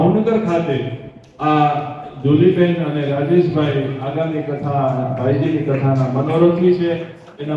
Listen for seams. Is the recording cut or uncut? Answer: uncut